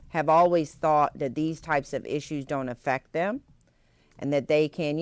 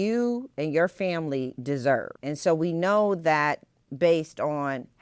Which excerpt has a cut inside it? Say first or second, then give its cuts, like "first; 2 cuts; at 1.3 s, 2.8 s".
second; 1 cut; at 2.1 s